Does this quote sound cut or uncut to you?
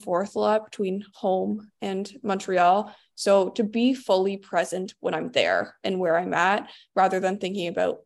uncut